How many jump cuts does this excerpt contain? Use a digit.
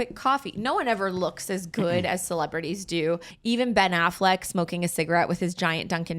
1